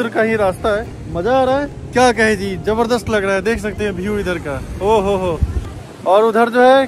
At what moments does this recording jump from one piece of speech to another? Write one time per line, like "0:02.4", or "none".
none